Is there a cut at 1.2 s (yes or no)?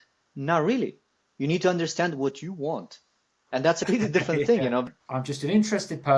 no